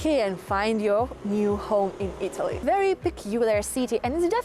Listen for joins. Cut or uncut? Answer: cut